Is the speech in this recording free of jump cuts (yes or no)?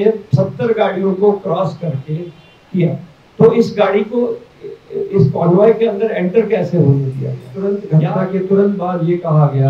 no